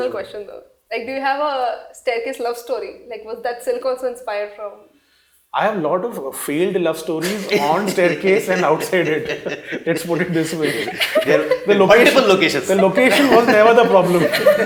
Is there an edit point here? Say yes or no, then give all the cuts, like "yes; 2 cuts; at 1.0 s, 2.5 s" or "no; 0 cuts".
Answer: no; 0 cuts